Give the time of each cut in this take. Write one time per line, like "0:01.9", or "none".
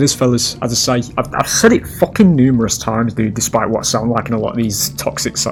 none